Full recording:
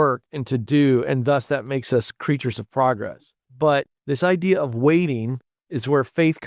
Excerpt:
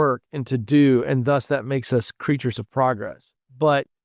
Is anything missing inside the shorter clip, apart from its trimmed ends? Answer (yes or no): no